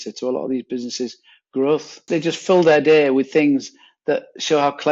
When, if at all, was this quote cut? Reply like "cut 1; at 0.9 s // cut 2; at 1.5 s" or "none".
cut 1; at 2.0 s